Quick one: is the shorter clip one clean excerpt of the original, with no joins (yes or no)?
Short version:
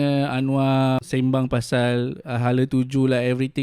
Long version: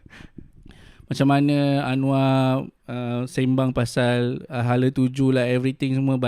no